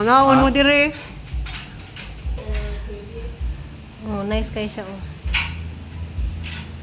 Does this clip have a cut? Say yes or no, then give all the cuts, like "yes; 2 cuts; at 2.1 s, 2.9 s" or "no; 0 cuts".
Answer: yes; 1 cut; at 2.3 s